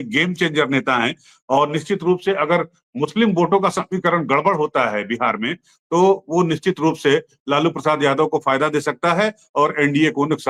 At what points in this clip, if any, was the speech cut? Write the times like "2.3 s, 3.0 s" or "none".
none

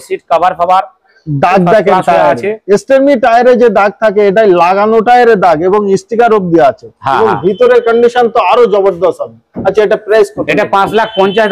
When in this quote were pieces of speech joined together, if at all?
none

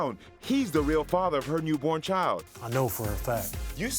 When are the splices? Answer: 2.6 s

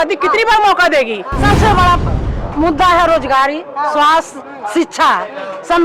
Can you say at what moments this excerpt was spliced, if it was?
1.3 s

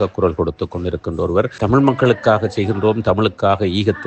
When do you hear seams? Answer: 1.6 s

